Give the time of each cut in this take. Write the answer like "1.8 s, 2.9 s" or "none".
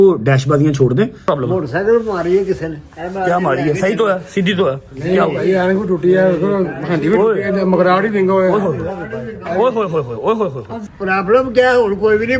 1.2 s, 10.7 s

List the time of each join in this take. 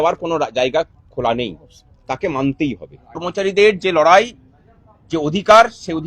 3.2 s

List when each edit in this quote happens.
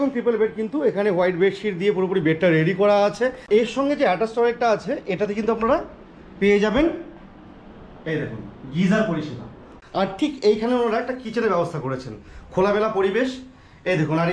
3.4 s, 9.7 s

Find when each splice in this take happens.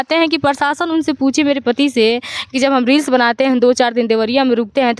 none

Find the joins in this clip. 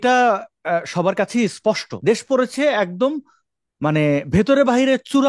1.9 s

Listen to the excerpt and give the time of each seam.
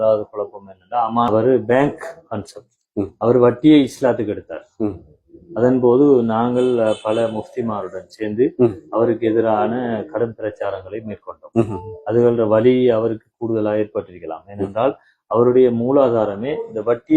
1.3 s

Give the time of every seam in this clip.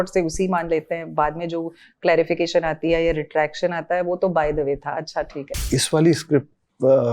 5.7 s

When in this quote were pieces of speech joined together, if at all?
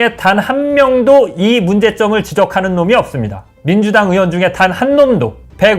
none

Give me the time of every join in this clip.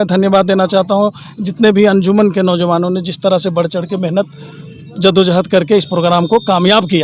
none

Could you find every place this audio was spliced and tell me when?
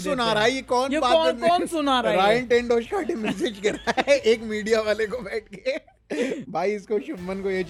none

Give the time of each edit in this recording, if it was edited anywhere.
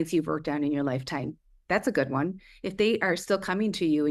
none

